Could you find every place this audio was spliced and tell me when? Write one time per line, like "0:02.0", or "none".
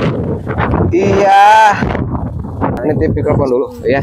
0:02.8

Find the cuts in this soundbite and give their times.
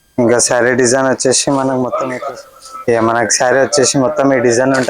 0:02.2

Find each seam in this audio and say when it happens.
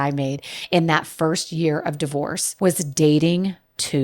0:02.4

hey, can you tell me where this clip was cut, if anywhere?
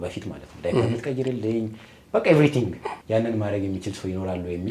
0:02.9

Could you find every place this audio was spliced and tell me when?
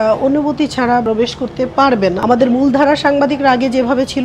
0:01.0
0:02.2

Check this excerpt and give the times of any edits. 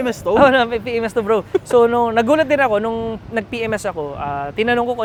none

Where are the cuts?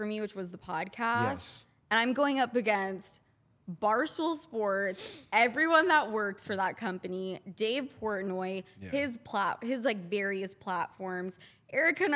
none

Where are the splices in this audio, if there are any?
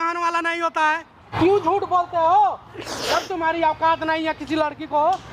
0:01.3

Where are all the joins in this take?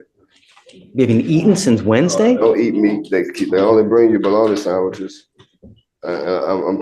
none

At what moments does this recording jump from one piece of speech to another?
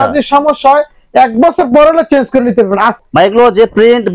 0:02.9

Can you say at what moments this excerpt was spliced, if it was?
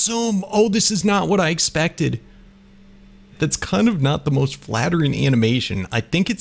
0:03.3

